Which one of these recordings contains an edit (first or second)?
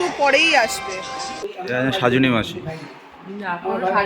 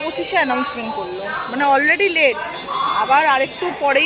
first